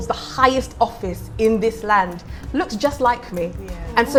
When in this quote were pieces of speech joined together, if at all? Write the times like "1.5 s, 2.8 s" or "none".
none